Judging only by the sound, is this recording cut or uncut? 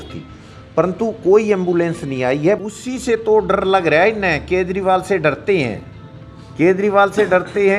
cut